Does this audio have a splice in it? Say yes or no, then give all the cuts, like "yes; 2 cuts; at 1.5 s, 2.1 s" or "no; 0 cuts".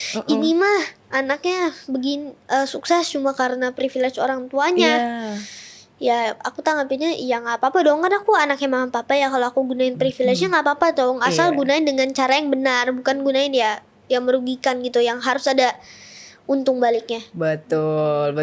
no; 0 cuts